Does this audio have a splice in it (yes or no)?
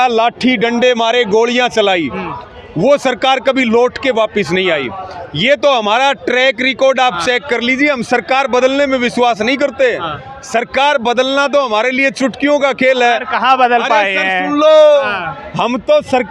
no